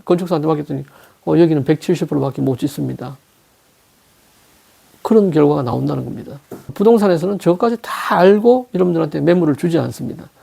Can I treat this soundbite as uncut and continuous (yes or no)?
no